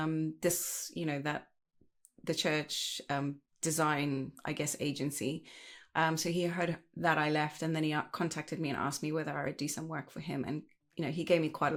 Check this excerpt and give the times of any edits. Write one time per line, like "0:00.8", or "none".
none